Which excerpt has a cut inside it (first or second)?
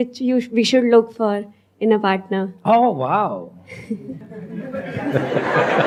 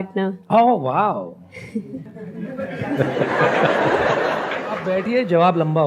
second